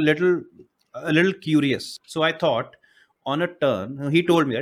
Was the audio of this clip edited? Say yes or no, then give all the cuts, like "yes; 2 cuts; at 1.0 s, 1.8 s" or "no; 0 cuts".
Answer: yes; 1 cut; at 2.0 s